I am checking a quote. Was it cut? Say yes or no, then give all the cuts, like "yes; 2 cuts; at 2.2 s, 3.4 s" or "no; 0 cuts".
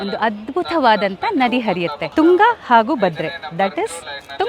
yes; 1 cut; at 2.0 s